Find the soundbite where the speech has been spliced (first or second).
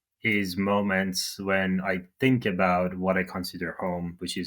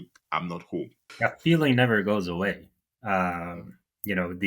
second